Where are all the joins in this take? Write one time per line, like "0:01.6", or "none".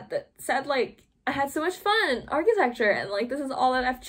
none